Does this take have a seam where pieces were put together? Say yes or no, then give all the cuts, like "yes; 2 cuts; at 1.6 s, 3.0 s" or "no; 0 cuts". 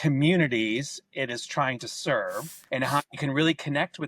yes; 1 cut; at 2.5 s